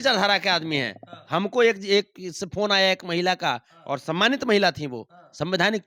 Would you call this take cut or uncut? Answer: uncut